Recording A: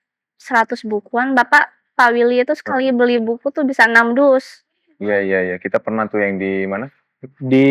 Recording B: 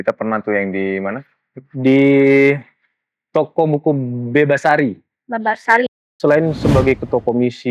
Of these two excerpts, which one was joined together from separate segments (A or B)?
B